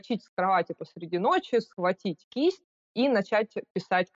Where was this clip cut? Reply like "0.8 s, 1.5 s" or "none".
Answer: none